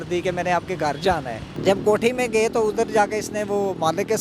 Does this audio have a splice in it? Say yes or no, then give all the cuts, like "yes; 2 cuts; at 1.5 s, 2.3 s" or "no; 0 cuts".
yes; 1 cut; at 1.5 s